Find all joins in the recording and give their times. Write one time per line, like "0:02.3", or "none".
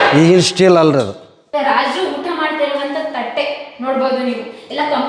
0:01.3

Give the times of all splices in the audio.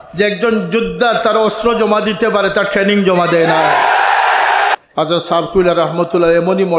none

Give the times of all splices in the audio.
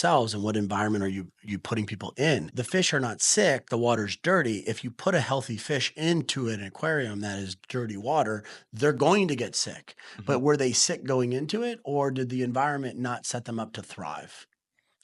0:02.5

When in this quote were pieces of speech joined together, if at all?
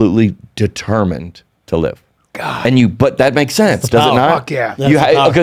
none

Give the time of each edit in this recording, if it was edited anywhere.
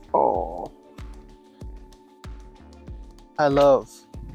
none

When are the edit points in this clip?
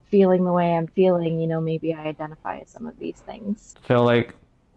none

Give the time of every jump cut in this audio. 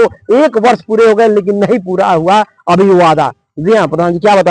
none

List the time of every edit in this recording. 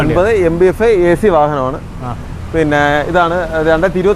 none

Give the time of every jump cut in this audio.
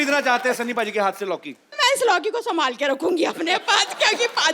0:01.7

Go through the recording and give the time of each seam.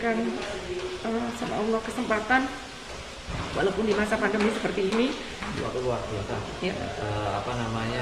0:05.6

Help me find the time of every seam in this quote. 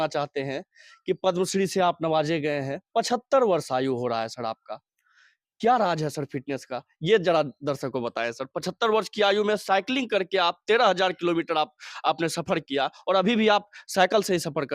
none

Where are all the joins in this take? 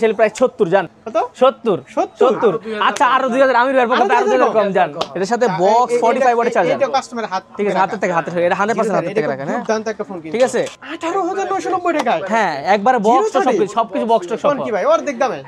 0:01.0
0:05.1
0:10.8

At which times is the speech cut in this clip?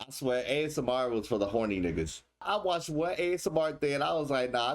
0:02.3

